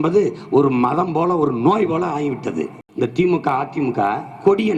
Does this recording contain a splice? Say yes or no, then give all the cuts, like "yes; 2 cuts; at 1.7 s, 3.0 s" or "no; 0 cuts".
yes; 1 cut; at 2.8 s